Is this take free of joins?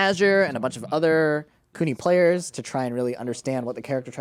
yes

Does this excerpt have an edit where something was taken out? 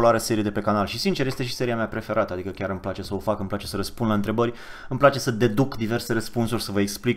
no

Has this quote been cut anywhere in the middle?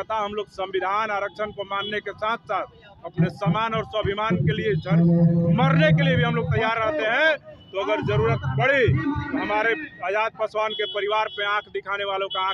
no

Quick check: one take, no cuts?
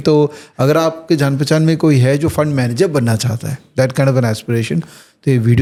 yes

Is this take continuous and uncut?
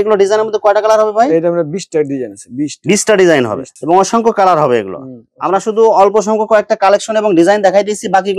yes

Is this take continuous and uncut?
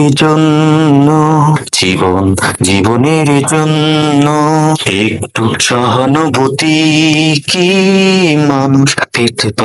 yes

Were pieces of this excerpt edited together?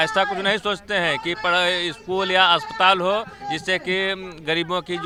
no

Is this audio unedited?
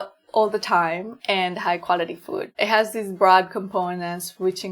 no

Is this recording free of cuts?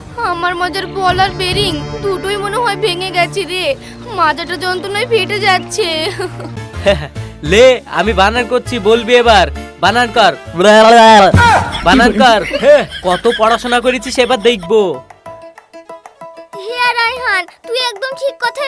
no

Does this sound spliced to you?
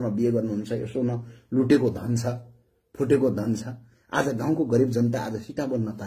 no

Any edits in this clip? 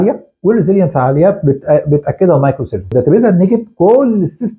yes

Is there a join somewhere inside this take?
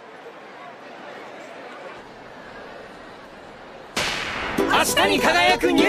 no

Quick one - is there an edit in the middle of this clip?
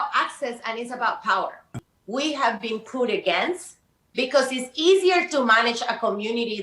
yes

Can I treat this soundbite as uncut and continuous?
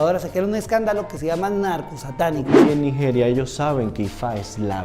no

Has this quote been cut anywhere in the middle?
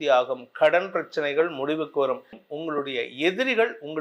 yes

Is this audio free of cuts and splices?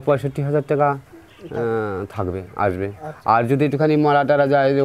yes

